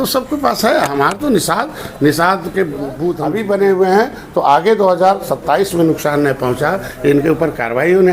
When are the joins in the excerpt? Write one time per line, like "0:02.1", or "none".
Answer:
0:03.2